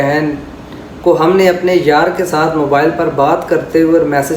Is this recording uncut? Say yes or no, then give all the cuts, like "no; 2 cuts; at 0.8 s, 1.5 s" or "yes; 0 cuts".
yes; 0 cuts